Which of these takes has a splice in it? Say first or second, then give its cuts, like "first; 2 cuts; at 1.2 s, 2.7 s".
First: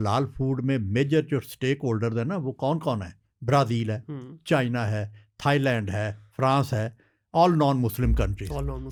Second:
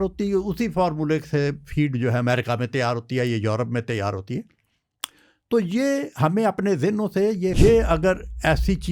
second; 1 cut; at 7.5 s